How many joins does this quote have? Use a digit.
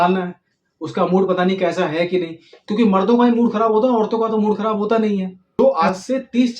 1